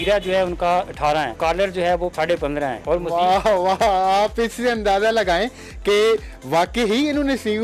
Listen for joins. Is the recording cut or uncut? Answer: cut